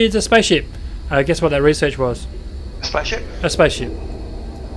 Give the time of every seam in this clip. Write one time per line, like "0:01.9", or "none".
none